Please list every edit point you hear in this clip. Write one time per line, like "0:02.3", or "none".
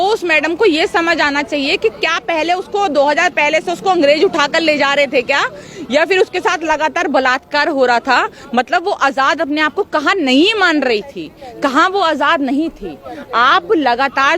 none